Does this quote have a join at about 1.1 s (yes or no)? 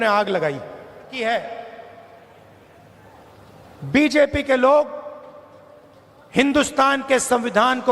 yes